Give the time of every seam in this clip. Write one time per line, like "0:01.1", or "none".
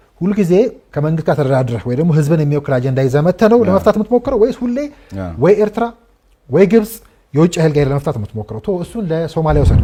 none